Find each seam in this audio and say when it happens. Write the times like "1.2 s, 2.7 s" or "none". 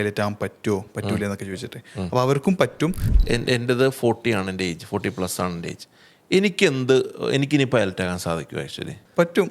3.1 s